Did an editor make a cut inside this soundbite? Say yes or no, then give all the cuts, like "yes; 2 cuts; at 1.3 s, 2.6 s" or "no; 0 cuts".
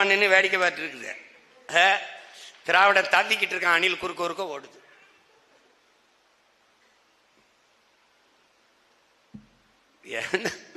no; 0 cuts